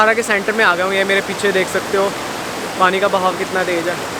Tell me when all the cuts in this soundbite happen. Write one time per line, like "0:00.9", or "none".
none